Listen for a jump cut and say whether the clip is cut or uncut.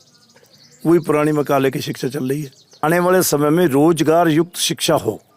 cut